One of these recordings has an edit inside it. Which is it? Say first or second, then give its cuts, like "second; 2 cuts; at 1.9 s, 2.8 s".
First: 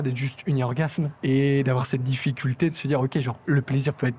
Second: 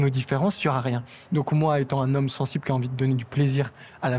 first; 2 cuts; at 1.1 s, 3.3 s